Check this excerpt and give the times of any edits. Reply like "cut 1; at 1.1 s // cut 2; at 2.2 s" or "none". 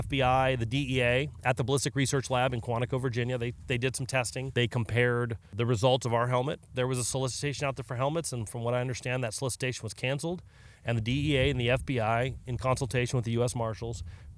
cut 1; at 4.5 s // cut 2; at 5.5 s // cut 3; at 6.6 s